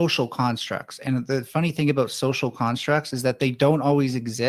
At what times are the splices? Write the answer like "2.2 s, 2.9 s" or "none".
none